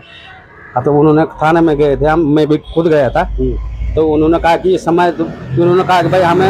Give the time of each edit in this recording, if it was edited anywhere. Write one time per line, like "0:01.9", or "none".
none